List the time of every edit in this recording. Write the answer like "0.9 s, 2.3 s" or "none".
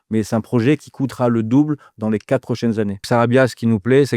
3.1 s